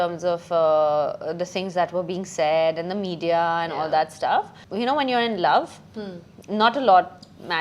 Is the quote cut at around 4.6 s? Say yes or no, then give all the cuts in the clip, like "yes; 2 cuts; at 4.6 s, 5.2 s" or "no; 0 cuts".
yes; 1 cut; at 4.6 s